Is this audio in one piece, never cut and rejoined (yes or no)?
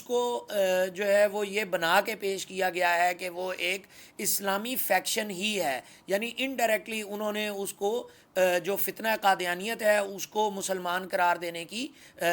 yes